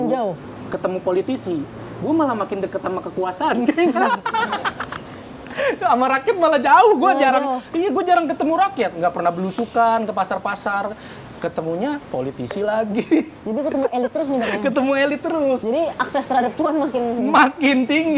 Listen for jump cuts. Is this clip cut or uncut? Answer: uncut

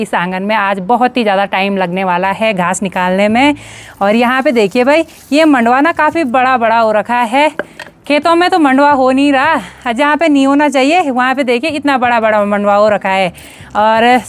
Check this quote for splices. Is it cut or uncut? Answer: uncut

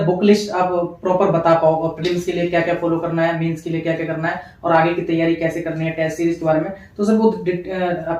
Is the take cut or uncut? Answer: uncut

